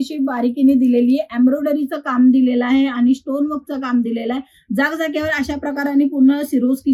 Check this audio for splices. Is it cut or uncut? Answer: uncut